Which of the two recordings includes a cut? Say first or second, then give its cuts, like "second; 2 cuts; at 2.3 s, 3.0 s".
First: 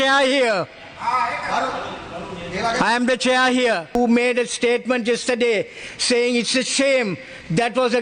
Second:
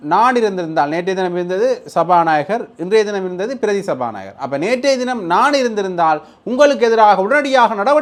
first; 1 cut; at 3.9 s